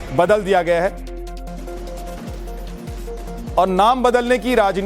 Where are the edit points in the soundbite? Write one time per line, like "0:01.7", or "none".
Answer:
0:02.6